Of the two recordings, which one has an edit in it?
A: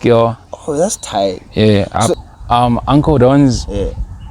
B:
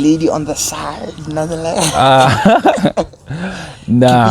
A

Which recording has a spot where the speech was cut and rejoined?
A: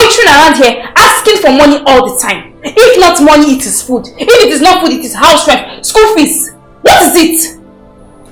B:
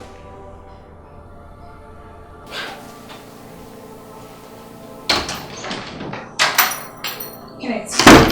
B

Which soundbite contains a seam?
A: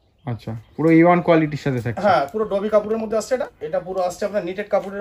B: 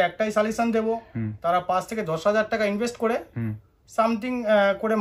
A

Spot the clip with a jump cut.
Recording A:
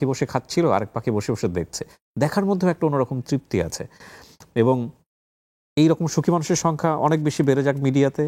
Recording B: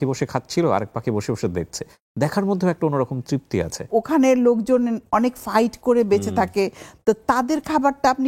B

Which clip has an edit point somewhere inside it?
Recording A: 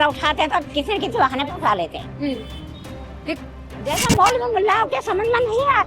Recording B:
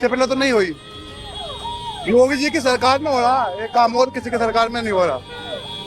A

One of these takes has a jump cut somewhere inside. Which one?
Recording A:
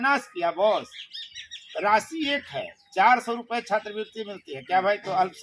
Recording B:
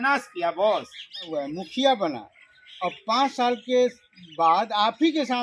B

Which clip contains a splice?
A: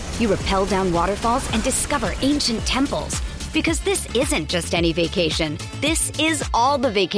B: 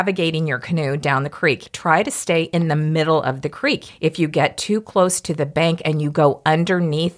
B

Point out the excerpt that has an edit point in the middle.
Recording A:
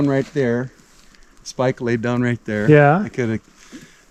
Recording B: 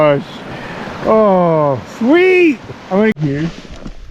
B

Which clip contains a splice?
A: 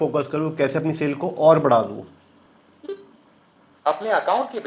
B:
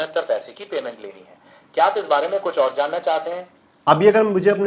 B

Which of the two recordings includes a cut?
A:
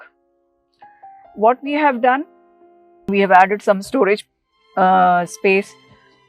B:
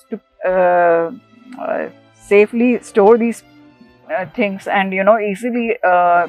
A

